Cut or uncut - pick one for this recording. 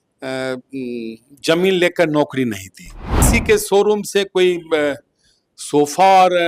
cut